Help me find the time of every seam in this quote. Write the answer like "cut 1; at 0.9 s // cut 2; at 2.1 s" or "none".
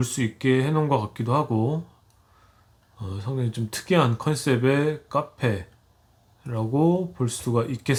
none

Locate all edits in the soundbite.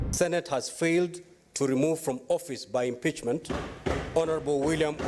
none

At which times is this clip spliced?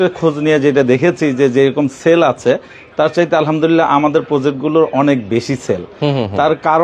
none

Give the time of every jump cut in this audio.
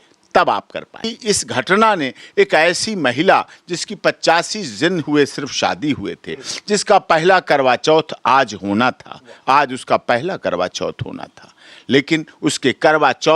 cut 1; at 1.1 s

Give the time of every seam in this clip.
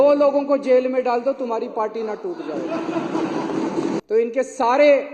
cut 1; at 4.0 s

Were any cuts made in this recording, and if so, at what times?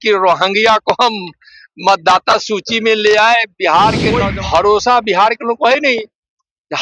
cut 1; at 4.2 s

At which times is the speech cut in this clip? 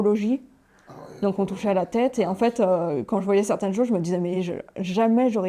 none

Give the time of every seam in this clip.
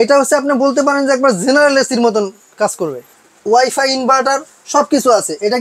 cut 1; at 3.1 s

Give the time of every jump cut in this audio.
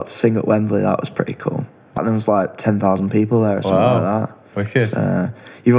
cut 1; at 2.0 s

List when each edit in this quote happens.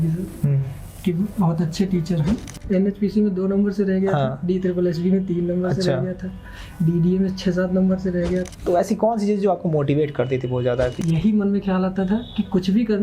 cut 1; at 2.5 s // cut 2; at 8.5 s // cut 3; at 11.0 s

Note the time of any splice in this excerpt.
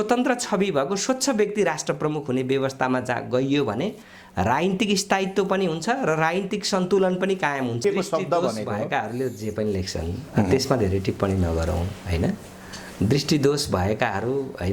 cut 1; at 7.8 s

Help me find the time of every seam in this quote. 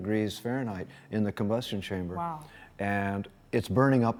none

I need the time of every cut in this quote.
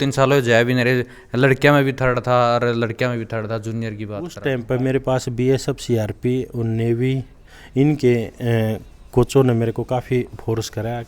cut 1; at 4.4 s

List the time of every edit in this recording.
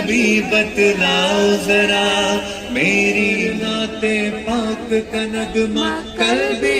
cut 1; at 3.5 s

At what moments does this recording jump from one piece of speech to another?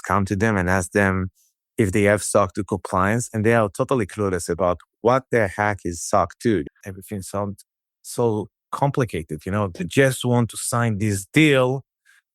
cut 1; at 6.7 s

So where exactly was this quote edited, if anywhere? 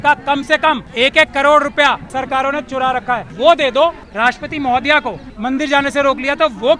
cut 1; at 0.9 s // cut 2; at 2.0 s // cut 3; at 3.3 s // cut 4; at 4.0 s // cut 5; at 5.2 s

